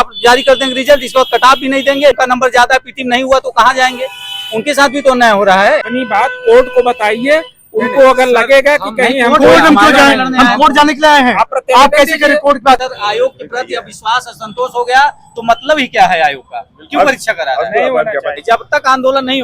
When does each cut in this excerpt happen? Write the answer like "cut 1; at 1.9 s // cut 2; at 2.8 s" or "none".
cut 1; at 2.2 s // cut 2; at 5.9 s // cut 3; at 12.8 s // cut 4; at 18.4 s